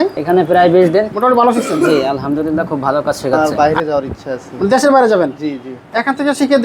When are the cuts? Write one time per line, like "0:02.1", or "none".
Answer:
0:01.1
0:03.4